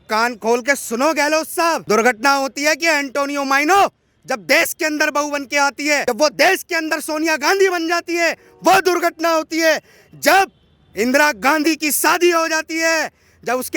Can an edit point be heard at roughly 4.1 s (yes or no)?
no